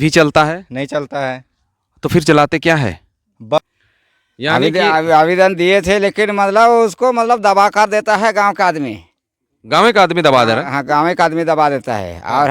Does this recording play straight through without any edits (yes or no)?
no